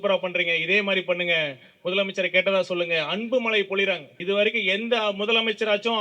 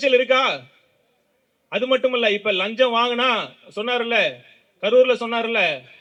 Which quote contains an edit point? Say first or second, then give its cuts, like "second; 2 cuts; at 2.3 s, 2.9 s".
first; 1 cut; at 4.1 s